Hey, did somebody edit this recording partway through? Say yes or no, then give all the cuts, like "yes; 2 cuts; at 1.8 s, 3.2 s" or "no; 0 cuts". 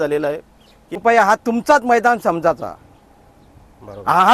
yes; 1 cut; at 1.0 s